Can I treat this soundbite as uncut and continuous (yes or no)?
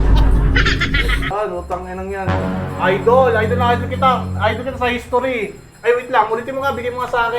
no